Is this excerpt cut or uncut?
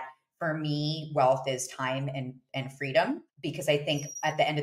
cut